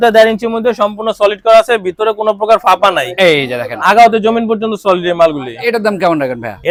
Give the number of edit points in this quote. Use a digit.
0